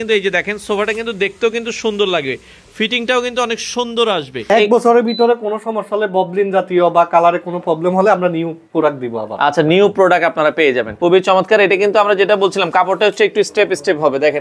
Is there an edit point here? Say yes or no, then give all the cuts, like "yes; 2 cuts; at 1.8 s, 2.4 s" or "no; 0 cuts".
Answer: yes; 2 cuts; at 4.5 s, 10.9 s